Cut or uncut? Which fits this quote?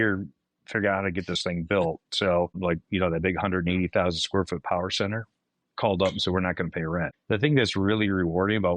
cut